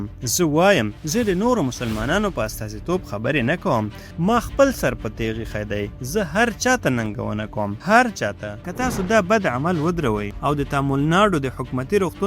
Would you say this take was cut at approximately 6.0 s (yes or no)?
no